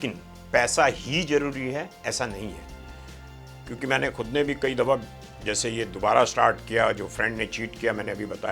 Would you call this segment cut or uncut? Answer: uncut